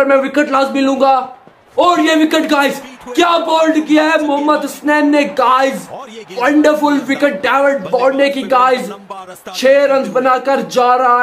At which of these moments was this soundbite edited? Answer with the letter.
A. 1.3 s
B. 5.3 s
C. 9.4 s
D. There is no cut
D